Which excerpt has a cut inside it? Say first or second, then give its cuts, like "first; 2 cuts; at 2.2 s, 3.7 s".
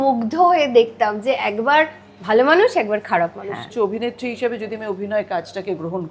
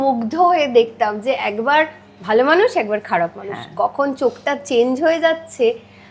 first; 1 cut; at 3.7 s